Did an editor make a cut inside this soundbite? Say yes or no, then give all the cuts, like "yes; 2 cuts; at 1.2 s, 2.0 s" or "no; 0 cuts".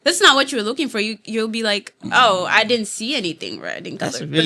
no; 0 cuts